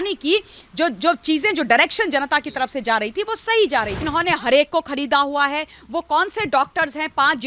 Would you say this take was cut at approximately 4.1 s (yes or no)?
yes